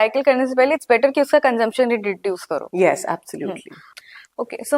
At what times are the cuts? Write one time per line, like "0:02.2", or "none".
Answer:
none